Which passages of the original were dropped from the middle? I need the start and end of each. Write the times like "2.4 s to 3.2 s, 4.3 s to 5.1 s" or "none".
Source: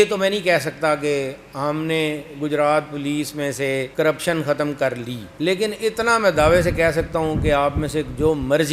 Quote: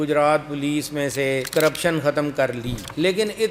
none